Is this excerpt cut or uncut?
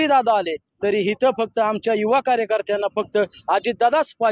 uncut